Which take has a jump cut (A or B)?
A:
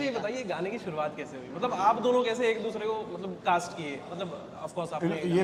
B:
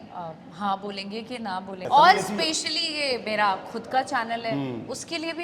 B